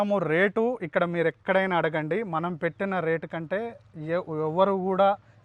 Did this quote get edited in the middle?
no; 0 cuts

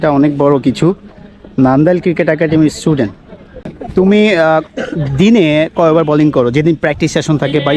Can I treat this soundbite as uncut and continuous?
no; 1 cut; at 3.7 s

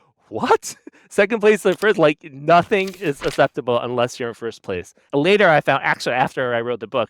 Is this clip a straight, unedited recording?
no; 1 cut; at 5.1 s

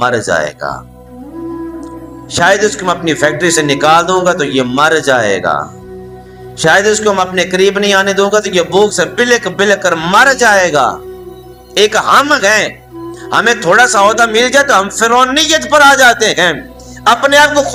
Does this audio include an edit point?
no; 0 cuts

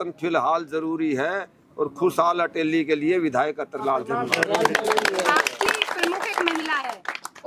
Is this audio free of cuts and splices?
yes; 0 cuts

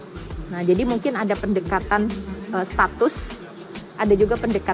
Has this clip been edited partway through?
no; 0 cuts

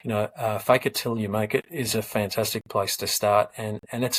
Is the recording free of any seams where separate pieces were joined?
yes; 0 cuts

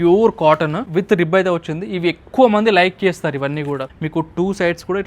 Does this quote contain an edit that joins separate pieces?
yes; 2 cuts; at 0.8 s, 3.9 s

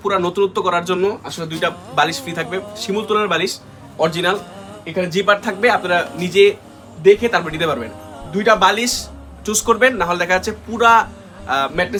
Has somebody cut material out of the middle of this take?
no; 0 cuts

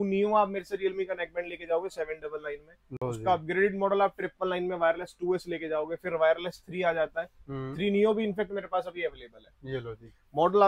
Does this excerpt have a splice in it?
no; 0 cuts

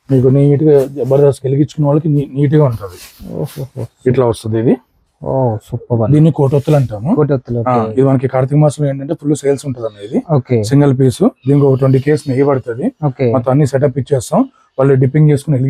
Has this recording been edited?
no; 0 cuts

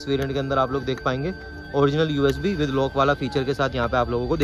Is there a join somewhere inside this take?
no; 0 cuts

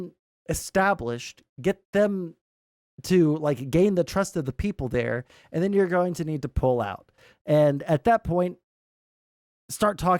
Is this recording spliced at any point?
no; 0 cuts

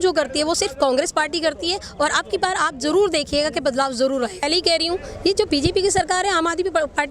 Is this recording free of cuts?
no; 1 cut; at 4.5 s

